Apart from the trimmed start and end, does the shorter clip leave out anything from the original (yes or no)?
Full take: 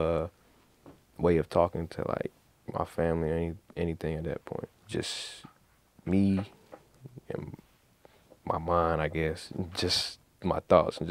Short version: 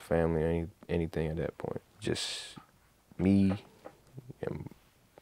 no